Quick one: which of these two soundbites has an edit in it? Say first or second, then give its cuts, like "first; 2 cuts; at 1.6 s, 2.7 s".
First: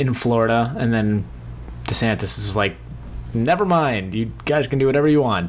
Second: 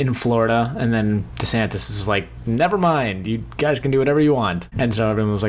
second; 3 cuts; at 1.4 s, 2.3 s, 4.7 s